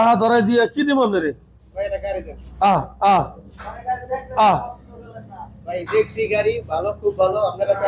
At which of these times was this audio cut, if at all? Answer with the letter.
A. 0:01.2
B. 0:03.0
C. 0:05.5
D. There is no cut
D